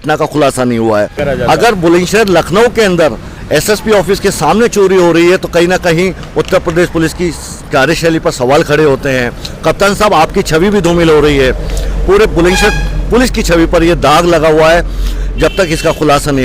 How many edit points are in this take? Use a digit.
1